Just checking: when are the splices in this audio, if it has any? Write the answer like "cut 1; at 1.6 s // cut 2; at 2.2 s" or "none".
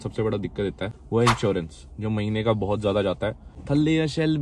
cut 1; at 0.9 s // cut 2; at 3.6 s